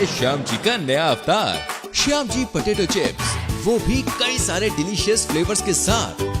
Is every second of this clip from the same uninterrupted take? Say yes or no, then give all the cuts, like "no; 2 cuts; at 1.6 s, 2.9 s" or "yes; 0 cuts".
yes; 0 cuts